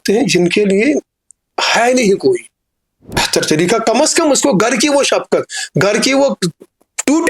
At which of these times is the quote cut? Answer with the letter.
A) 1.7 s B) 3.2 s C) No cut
B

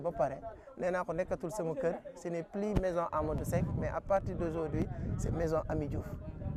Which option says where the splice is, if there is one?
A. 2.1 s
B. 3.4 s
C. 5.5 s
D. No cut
D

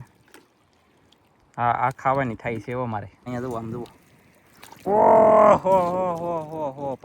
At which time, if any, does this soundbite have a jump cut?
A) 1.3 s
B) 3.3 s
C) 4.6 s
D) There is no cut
B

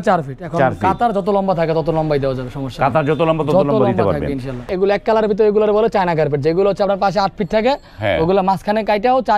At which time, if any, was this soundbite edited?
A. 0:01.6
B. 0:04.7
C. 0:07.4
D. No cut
B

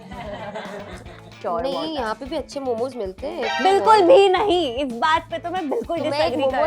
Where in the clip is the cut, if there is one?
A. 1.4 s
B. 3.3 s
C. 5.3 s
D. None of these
A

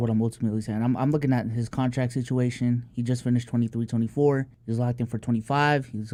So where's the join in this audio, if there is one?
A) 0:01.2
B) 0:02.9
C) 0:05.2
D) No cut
D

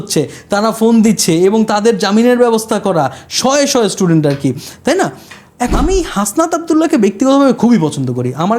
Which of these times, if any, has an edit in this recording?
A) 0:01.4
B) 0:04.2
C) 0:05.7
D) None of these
C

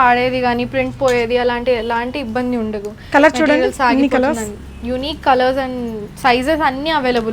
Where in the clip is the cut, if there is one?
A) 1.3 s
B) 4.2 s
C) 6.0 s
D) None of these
D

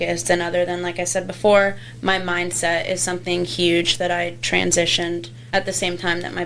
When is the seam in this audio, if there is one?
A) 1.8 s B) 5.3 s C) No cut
B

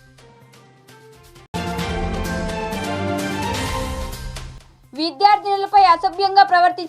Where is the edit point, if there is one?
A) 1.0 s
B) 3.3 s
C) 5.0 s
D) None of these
A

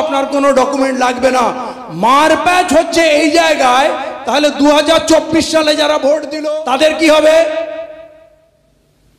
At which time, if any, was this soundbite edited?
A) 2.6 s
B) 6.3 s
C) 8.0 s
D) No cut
B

